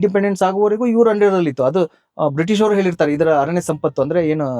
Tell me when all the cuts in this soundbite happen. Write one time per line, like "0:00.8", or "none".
none